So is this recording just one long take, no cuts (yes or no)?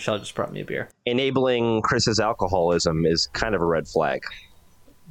no